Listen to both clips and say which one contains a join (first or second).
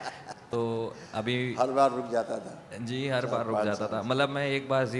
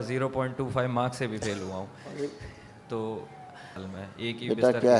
second